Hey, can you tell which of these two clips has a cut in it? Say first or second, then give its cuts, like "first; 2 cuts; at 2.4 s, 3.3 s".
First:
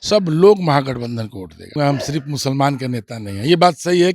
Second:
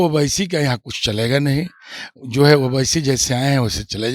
first; 1 cut; at 1.7 s